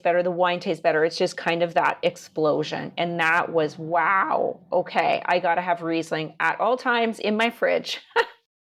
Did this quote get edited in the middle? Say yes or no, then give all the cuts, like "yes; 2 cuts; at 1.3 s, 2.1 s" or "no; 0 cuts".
no; 0 cuts